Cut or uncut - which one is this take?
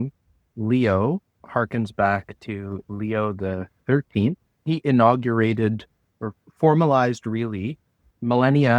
cut